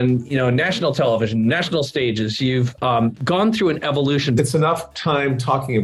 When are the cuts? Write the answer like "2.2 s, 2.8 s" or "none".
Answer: 4.3 s